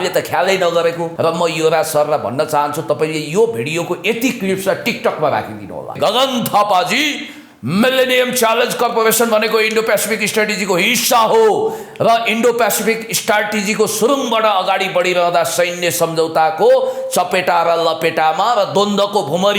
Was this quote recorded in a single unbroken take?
no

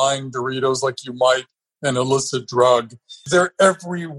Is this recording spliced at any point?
yes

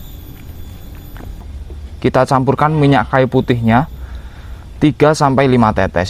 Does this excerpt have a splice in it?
yes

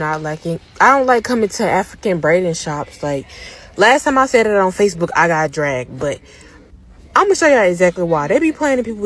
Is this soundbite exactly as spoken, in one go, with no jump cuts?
yes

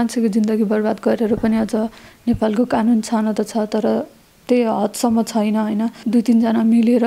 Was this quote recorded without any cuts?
no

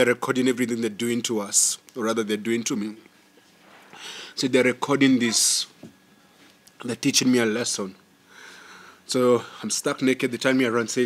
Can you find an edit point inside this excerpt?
no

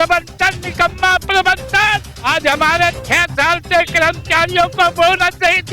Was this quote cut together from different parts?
yes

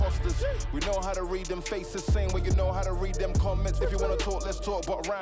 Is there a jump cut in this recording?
no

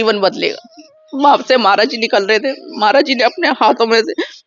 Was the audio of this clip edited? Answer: yes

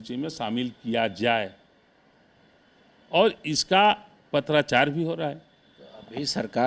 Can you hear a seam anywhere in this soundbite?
no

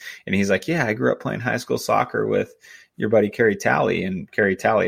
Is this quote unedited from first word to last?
yes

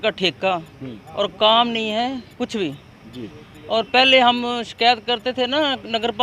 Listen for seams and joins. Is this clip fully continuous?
yes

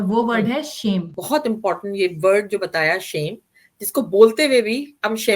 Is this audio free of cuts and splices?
no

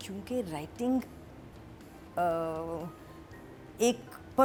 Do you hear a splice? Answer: no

